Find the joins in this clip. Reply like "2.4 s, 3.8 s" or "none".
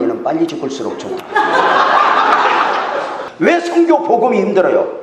3.2 s